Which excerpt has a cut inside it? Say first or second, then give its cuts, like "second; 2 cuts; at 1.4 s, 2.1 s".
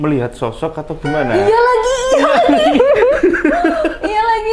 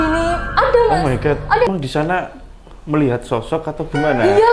second; 1 cut; at 1.7 s